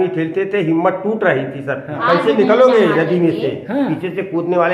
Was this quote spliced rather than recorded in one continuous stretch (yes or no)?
yes